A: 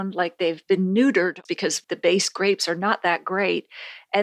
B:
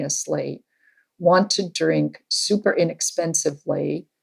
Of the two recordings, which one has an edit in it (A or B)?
A